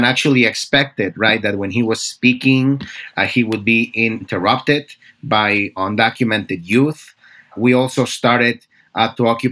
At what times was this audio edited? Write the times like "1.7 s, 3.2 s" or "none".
4.2 s, 5.8 s